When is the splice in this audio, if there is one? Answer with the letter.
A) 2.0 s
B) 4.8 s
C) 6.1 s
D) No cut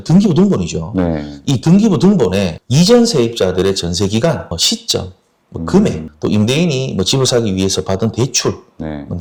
D